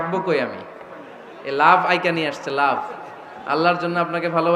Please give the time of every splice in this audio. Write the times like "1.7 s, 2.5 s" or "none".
none